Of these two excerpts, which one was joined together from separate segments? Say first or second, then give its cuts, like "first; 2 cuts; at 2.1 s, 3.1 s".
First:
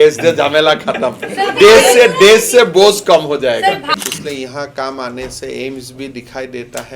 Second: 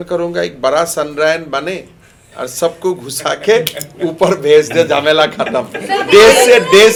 first; 1 cut; at 3.9 s